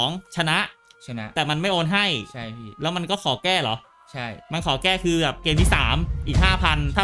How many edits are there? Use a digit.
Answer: 0